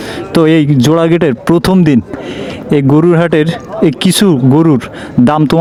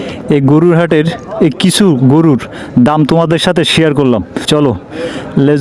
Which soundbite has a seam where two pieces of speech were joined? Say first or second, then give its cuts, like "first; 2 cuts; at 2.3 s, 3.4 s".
second; 1 cut; at 4.3 s